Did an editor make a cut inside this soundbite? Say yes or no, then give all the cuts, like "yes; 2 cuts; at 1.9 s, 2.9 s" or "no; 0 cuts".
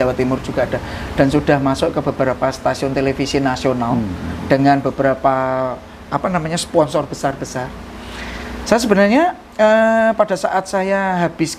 no; 0 cuts